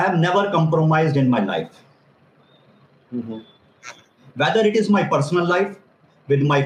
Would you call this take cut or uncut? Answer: uncut